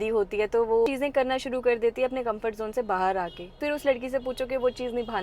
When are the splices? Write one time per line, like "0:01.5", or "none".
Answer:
0:00.9
0:03.6